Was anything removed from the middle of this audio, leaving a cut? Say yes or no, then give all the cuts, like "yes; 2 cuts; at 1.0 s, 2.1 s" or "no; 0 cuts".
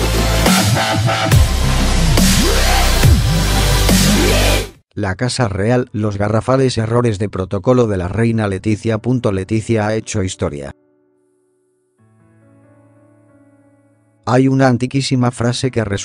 no; 0 cuts